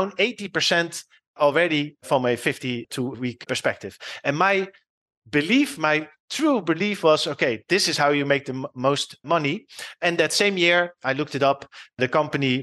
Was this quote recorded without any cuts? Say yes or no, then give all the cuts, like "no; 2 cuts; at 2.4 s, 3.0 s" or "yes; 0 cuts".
yes; 0 cuts